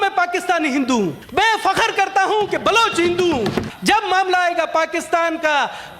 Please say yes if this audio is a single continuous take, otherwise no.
no